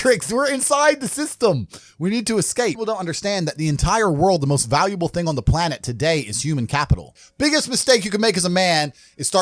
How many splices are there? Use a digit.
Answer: 2